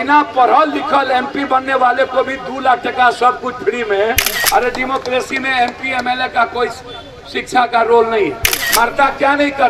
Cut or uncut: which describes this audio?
cut